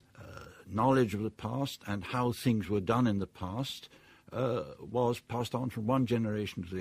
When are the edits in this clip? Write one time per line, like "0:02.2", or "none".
none